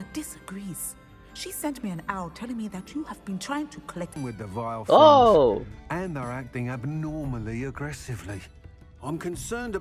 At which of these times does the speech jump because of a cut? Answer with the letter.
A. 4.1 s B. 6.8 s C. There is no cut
A